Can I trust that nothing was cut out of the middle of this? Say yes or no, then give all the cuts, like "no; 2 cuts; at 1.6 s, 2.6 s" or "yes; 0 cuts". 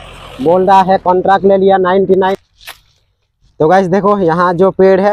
no; 1 cut; at 2.3 s